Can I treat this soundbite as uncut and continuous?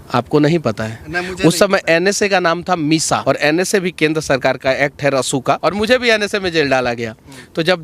no; 2 cuts; at 3.2 s, 5.6 s

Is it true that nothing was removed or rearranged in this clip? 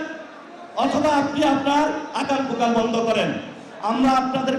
yes; 0 cuts

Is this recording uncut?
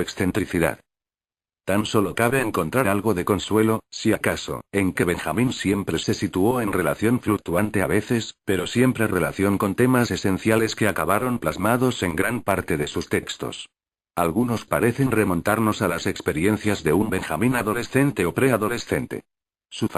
yes; 0 cuts

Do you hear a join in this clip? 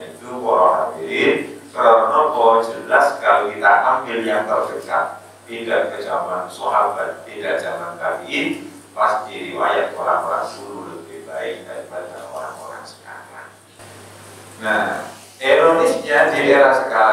yes; 1 cut; at 13.7 s

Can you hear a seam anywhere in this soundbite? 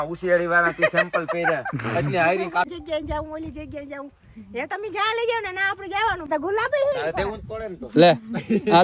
yes; 2 cuts; at 2.7 s, 6.3 s

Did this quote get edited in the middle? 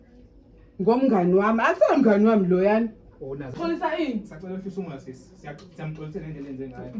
yes; 1 cut; at 3.5 s

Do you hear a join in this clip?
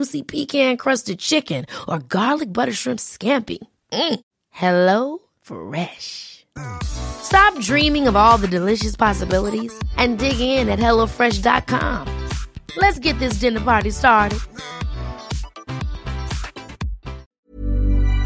yes; 1 cut; at 17.3 s

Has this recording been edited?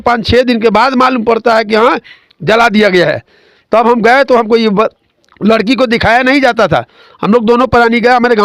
no; 0 cuts

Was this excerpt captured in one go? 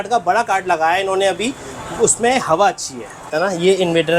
no; 1 cut; at 3.3 s

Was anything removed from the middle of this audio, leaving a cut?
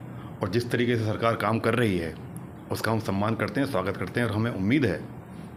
no; 0 cuts

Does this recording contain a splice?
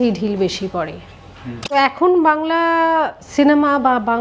yes; 2 cuts; at 1.9 s, 3.2 s

